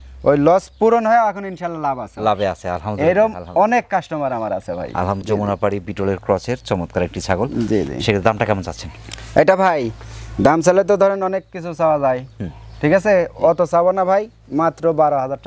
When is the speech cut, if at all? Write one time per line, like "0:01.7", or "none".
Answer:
none